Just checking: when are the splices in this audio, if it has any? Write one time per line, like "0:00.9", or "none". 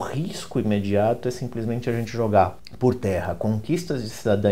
0:02.6